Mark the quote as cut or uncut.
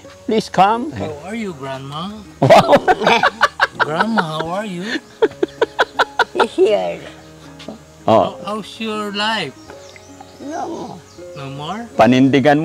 cut